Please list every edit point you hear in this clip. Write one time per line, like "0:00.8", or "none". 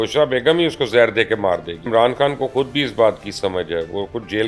0:01.9